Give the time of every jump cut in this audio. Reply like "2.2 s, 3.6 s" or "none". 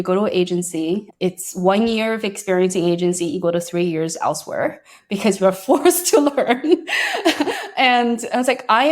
1.1 s

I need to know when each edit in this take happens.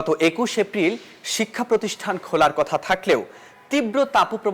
none

